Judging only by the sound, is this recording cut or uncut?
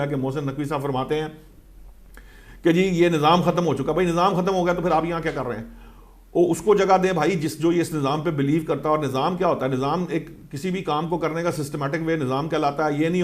uncut